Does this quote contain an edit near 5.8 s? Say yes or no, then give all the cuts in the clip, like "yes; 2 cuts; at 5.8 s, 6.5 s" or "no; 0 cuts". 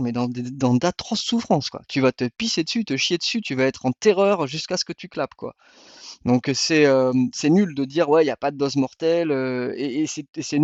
no; 0 cuts